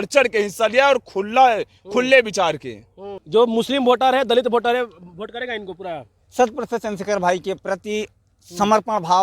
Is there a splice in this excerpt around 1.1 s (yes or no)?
no